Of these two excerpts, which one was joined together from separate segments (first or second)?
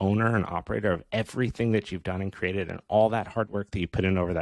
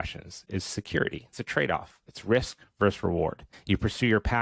second